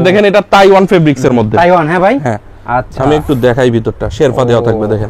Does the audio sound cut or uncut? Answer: uncut